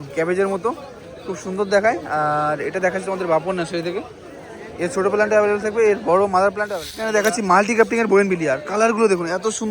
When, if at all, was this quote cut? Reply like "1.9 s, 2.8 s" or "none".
7.1 s